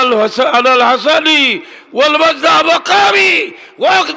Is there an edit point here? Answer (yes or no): no